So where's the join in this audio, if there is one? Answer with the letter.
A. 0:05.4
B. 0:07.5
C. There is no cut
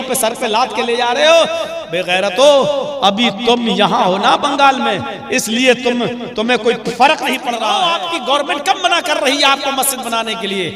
B